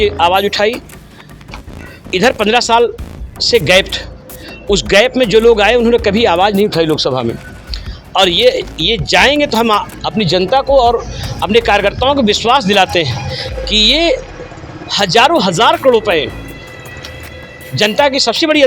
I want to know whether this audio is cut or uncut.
uncut